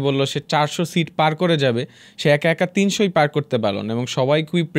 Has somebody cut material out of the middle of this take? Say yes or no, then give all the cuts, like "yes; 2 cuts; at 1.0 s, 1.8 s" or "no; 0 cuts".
no; 0 cuts